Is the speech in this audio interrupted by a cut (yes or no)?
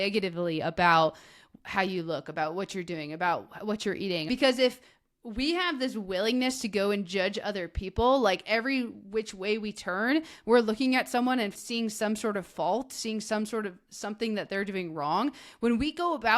yes